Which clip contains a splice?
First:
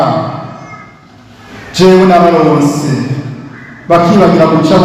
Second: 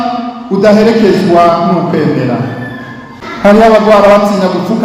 second; 1 cut; at 3.2 s

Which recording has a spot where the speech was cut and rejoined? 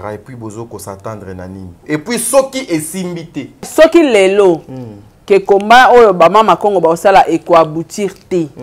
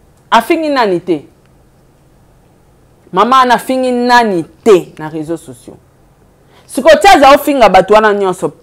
first; 2 cuts; at 1.7 s, 3.7 s

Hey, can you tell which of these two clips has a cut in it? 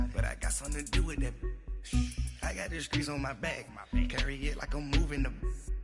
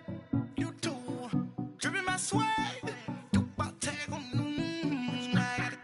first; 1 cut; at 2.0 s

